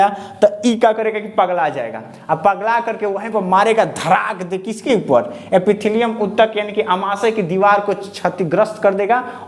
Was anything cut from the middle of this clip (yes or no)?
no